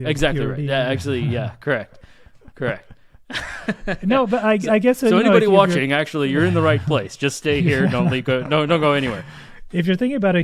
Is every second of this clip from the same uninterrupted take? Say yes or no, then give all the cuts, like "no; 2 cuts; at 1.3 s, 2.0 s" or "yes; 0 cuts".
yes; 0 cuts